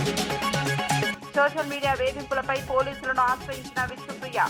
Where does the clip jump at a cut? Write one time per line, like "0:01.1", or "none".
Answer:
0:01.2